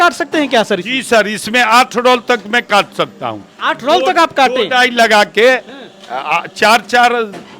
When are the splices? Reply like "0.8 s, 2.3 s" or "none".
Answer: none